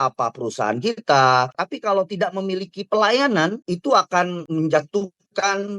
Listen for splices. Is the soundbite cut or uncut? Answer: cut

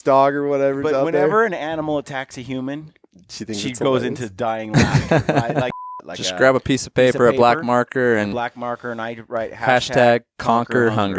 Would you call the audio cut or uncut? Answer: cut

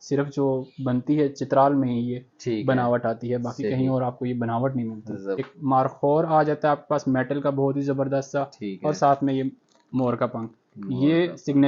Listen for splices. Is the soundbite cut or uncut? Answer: cut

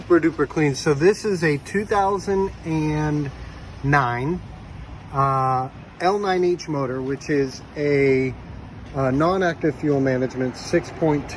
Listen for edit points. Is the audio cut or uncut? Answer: uncut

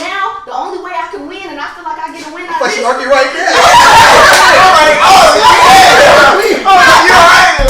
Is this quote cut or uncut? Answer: uncut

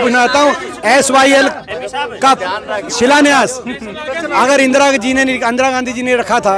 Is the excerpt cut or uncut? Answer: uncut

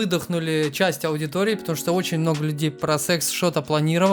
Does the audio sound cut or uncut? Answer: uncut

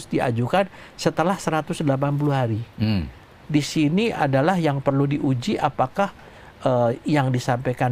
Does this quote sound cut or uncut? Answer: cut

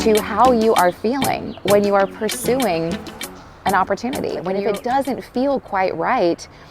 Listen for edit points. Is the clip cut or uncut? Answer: cut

